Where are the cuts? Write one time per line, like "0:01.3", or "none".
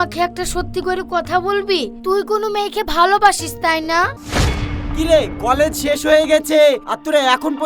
0:04.2